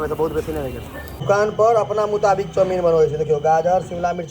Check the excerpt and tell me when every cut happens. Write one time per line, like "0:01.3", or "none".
0:01.0